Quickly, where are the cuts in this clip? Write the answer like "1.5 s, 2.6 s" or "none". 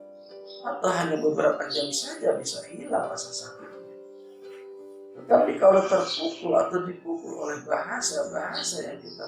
3.4 s, 4.9 s